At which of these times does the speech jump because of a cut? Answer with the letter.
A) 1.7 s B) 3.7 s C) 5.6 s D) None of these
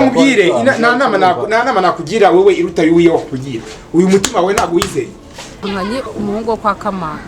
C